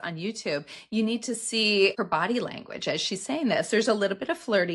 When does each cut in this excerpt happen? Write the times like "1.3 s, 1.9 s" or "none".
1.9 s